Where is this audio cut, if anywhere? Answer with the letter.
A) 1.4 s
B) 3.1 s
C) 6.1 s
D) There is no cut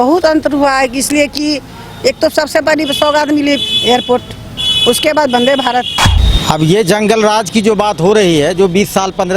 C